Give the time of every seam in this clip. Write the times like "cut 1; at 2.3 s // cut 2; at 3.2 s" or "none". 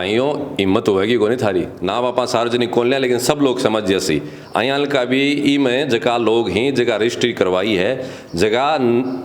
cut 1; at 1.8 s